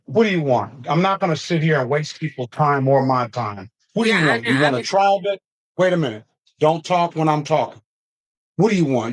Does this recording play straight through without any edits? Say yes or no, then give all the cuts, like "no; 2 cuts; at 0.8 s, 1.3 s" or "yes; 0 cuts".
yes; 0 cuts